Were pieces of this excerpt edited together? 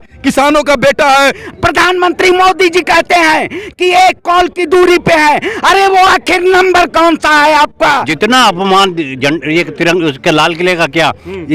yes; 2 cuts; at 1.4 s, 8.1 s

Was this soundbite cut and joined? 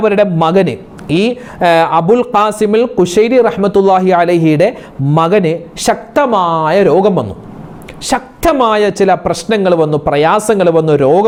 no; 0 cuts

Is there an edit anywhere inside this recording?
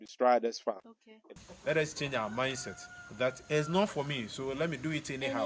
yes; 1 cut; at 1.3 s

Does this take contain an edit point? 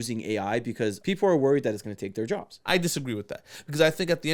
yes; 2 cuts; at 1.0 s, 2.5 s

